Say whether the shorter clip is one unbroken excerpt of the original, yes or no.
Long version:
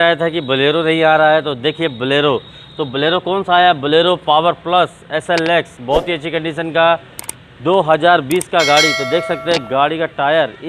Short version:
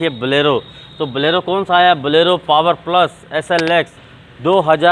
no